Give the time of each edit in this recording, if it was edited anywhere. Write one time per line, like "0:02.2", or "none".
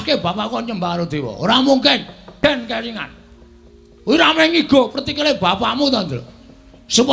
0:02.4